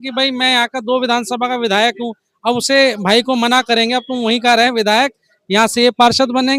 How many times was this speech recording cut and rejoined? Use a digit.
0